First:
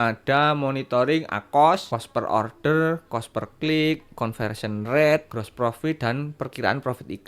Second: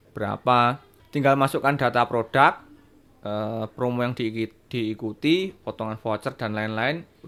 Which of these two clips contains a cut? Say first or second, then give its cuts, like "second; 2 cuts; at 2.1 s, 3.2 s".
first; 2 cuts; at 1.9 s, 5.4 s